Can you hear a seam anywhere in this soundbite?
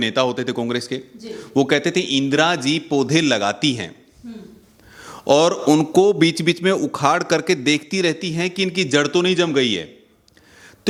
no; 0 cuts

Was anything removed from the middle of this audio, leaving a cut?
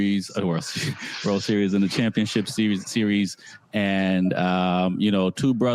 no; 0 cuts

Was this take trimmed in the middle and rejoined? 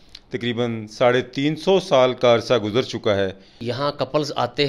yes; 1 cut; at 3.7 s

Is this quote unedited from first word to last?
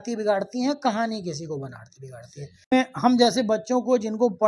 no; 1 cut; at 2.7 s

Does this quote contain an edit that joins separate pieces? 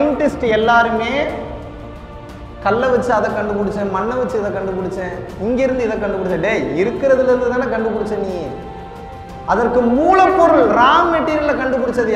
no; 0 cuts

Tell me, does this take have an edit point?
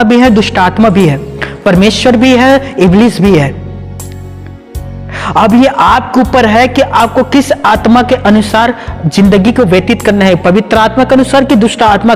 no; 0 cuts

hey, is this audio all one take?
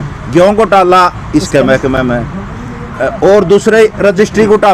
yes; 0 cuts

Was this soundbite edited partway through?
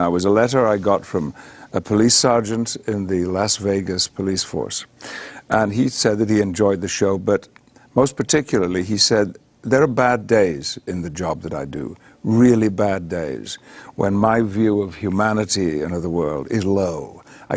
yes; 1 cut; at 6.0 s

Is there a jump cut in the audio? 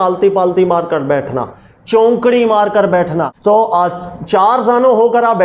yes; 1 cut; at 3.3 s

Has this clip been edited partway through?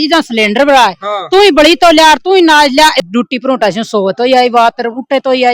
yes; 1 cut; at 3.0 s

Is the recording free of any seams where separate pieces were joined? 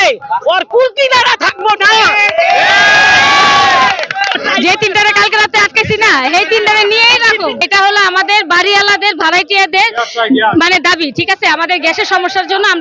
yes; 0 cuts

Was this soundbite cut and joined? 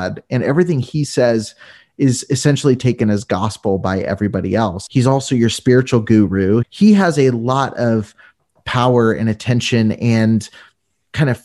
yes; 2 cuts; at 4.8 s, 6.6 s

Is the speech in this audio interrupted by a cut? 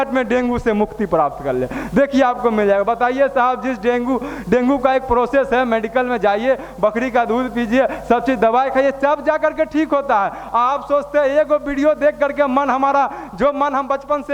no; 0 cuts

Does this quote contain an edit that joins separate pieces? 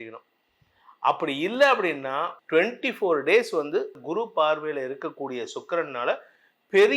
yes; 2 cuts; at 2.3 s, 4.0 s

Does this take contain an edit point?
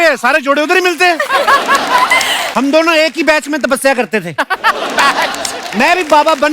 yes; 1 cut; at 2.4 s

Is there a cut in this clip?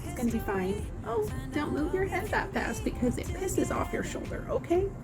no; 0 cuts

